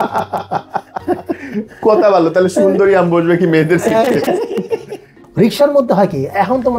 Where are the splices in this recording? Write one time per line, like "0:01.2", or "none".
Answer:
none